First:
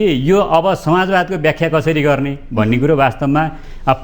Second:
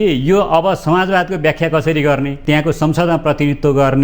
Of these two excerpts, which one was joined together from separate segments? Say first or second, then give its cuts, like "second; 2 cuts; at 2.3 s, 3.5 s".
second; 1 cut; at 2.4 s